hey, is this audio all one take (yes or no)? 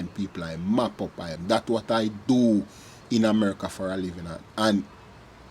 no